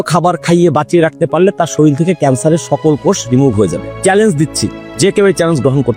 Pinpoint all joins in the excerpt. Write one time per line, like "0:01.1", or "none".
none